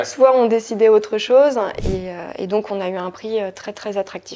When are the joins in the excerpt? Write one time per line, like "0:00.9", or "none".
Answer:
0:01.8